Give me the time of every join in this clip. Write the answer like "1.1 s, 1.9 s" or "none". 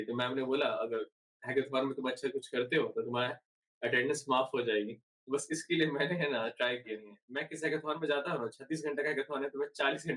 7.3 s